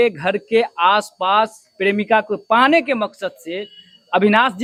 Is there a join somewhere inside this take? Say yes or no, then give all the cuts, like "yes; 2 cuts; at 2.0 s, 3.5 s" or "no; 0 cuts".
no; 0 cuts